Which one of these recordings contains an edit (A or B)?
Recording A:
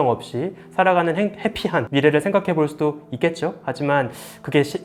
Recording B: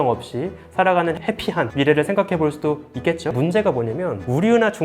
B